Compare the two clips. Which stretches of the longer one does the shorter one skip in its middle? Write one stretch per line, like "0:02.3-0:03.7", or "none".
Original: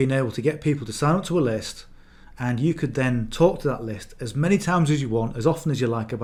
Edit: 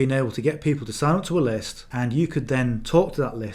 0:01.8-0:02.2